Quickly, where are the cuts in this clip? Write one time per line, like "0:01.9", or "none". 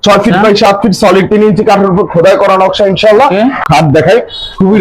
0:03.6